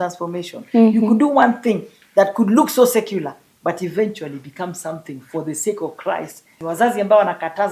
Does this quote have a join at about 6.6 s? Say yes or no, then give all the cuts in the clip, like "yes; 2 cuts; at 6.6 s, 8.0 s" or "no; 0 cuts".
yes; 1 cut; at 6.6 s